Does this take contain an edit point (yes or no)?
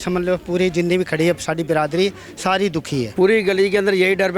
yes